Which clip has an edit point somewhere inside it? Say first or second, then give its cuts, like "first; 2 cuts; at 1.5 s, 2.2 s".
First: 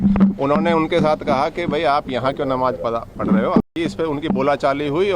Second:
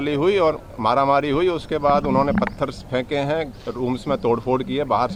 first; 1 cut; at 3.6 s